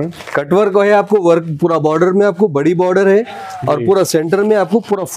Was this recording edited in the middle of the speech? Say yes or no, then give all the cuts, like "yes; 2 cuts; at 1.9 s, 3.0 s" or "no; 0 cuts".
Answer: no; 0 cuts